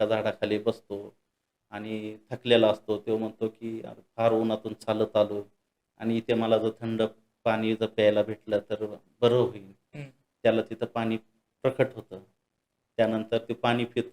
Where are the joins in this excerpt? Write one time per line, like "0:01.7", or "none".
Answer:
none